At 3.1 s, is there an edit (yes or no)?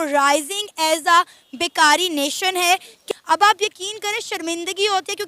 yes